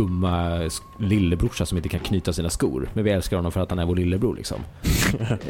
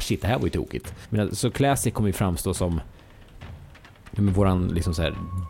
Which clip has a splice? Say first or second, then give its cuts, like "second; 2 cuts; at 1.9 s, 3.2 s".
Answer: second; 1 cut; at 1.0 s